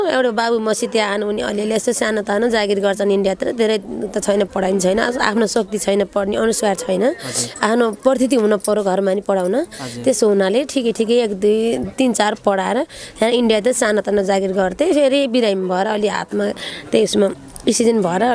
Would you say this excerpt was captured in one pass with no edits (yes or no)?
yes